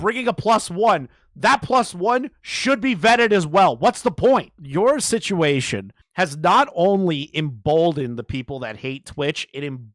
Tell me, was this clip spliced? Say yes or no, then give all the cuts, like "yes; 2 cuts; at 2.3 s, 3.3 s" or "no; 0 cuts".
yes; 1 cut; at 4.6 s